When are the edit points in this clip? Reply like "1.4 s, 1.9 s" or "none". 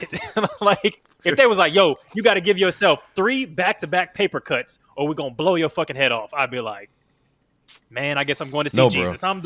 1.4 s